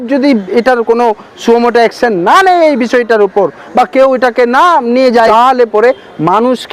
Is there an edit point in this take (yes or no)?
yes